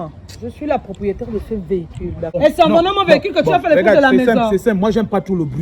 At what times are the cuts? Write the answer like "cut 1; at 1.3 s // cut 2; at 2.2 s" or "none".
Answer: cut 1; at 2.4 s